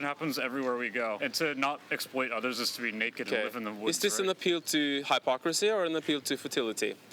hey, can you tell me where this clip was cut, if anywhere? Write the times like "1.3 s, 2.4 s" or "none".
1.2 s